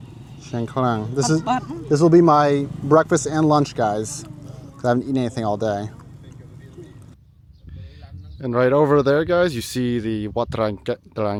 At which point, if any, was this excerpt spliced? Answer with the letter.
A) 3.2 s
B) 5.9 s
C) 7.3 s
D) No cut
D